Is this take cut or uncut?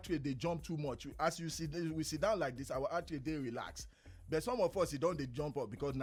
uncut